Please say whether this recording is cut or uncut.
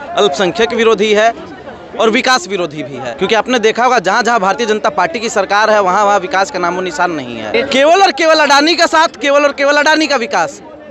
cut